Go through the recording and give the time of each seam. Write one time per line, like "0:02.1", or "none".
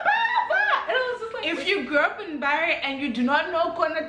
0:01.3